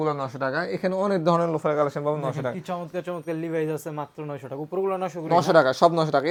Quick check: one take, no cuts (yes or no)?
yes